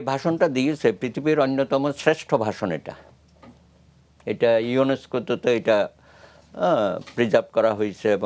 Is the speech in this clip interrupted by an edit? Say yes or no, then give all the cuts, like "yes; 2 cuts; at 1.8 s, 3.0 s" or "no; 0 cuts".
no; 0 cuts